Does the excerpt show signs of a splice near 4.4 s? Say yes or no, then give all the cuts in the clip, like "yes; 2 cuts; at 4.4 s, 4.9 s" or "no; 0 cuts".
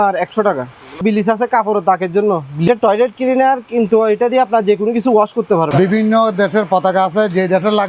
no; 3 cuts; at 1.0 s, 2.7 s, 5.7 s